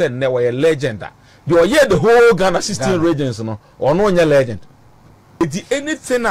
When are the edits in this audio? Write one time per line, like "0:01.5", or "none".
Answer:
0:05.4